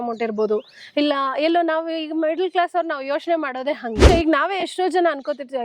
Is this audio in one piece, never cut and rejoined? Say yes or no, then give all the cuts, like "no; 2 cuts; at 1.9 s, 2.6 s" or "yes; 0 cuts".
no; 1 cut; at 4.1 s